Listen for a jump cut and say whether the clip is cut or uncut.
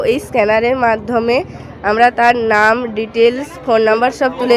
uncut